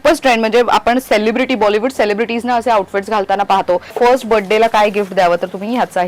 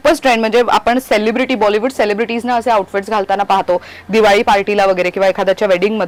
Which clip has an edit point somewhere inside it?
first; 1 cut; at 3.9 s

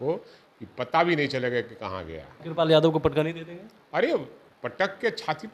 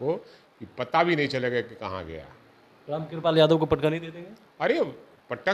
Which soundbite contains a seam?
first; 1 cut; at 2.4 s

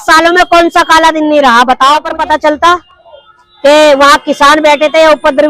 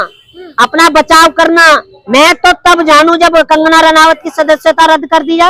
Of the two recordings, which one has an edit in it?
first; 1 cut; at 2.1 s

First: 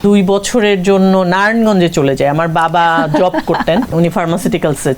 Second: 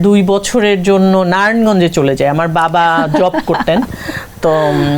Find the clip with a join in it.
first; 1 cut; at 3.9 s

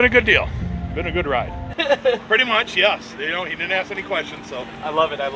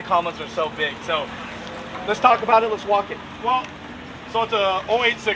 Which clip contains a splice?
first; 1 cut; at 1.8 s

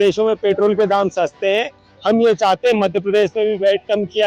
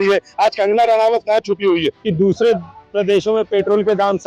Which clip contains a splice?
second; 1 cut; at 2.0 s

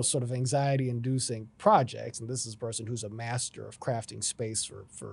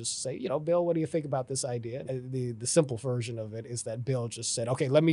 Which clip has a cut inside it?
second; 1 cut; at 2.1 s

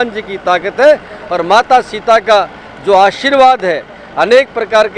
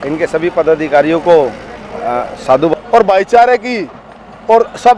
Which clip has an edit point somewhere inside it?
second; 1 cut; at 2.7 s

